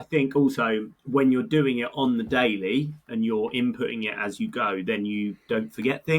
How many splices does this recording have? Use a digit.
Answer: 1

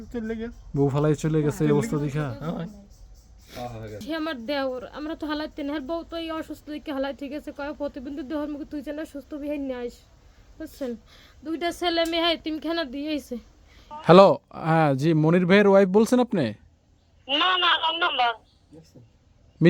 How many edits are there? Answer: 2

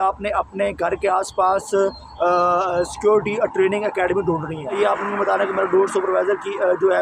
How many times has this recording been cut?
1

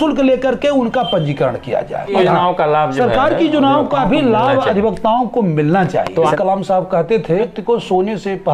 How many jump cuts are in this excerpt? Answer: 3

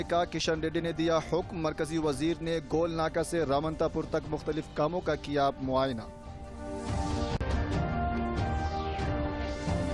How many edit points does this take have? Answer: 2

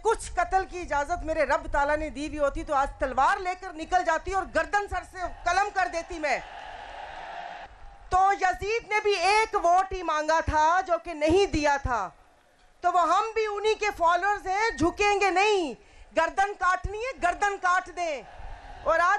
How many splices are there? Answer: 1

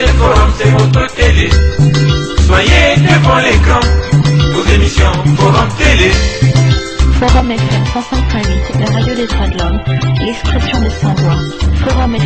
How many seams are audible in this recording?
0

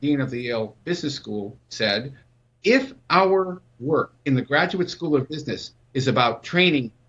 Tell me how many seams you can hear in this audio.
2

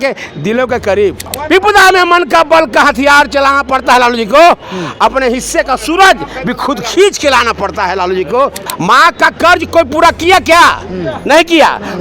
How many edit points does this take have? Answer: 2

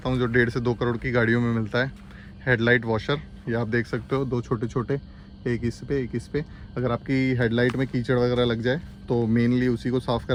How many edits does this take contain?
0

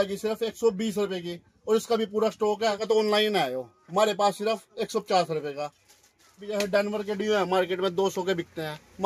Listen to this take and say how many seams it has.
2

